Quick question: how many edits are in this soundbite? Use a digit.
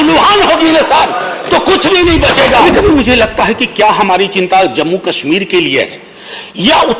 1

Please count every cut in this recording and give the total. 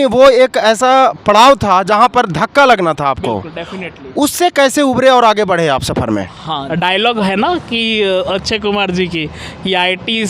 1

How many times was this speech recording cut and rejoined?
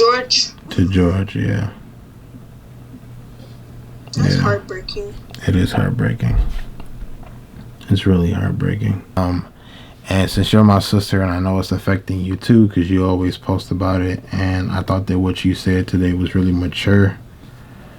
1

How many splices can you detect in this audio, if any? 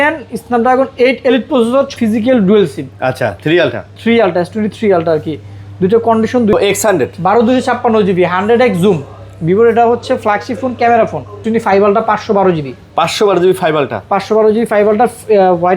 3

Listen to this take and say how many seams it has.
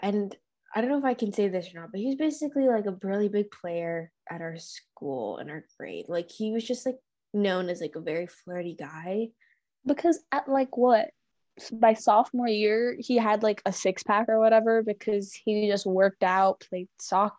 0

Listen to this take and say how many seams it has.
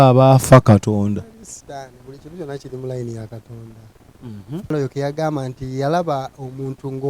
1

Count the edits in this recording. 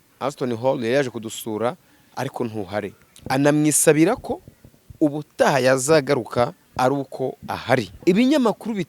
3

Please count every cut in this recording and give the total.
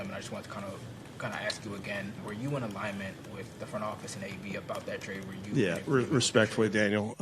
1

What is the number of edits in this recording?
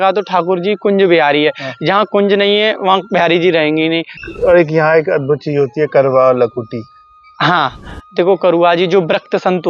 1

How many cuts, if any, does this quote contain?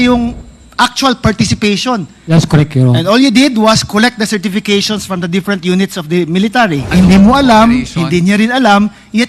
2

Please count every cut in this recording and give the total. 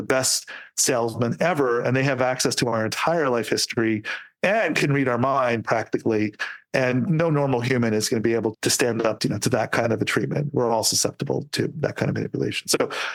0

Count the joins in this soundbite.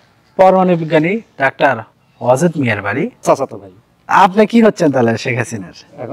1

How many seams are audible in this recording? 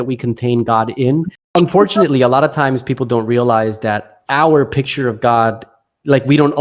1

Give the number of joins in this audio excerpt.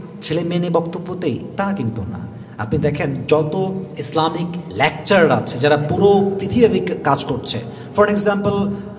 1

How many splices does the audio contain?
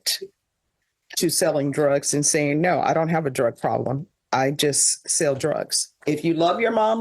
1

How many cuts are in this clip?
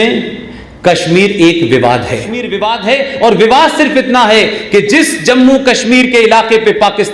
1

